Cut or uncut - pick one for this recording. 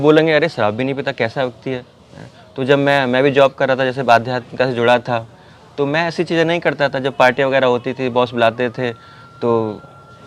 uncut